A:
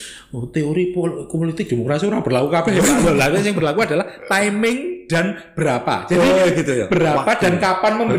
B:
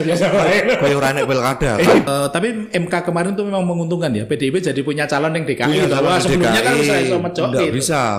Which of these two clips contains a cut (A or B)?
B